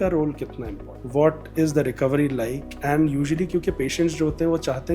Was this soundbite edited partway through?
no; 0 cuts

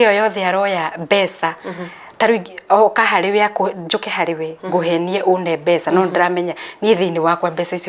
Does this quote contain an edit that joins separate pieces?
no; 0 cuts

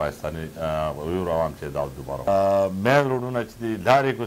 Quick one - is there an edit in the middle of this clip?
yes; 1 cut; at 2.3 s

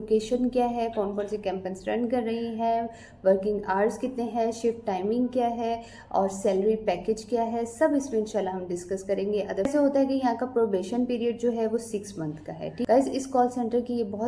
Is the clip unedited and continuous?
no; 2 cuts; at 9.7 s, 12.9 s

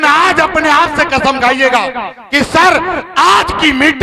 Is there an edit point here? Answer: no; 0 cuts

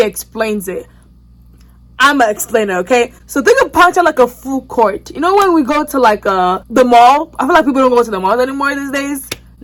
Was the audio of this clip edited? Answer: no; 0 cuts

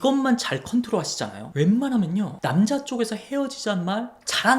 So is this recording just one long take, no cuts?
no; 1 cut; at 1.4 s

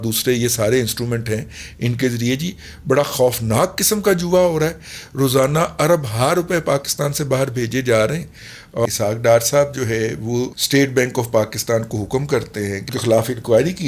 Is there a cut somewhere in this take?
yes; 3 cuts; at 8.8 s, 10.6 s, 12.9 s

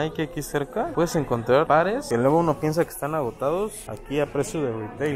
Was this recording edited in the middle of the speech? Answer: no; 0 cuts

